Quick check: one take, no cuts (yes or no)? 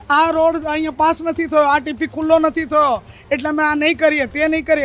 yes